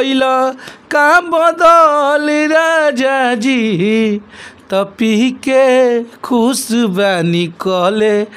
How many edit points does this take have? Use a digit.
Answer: 0